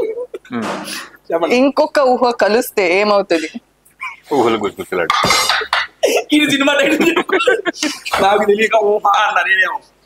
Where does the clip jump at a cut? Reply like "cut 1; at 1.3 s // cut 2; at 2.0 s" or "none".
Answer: none